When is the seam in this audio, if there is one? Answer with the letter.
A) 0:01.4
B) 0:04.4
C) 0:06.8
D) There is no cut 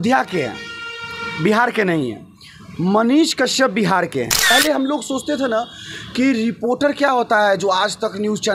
B